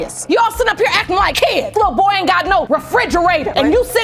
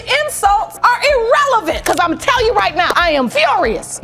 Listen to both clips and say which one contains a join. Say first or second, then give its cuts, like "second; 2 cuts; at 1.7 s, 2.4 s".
second; 1 cut; at 1.8 s